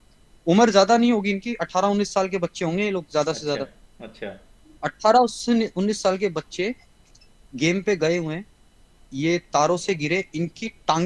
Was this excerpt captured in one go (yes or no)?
yes